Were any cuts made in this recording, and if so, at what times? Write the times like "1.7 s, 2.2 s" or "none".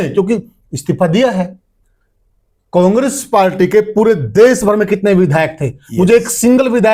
none